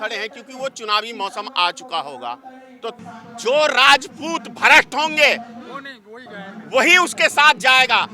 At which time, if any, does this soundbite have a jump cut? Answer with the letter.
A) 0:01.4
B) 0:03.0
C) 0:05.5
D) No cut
B